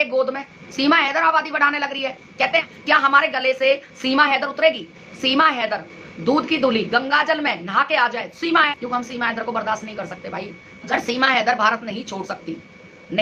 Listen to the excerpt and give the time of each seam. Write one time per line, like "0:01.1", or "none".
0:02.7
0:08.7
0:10.7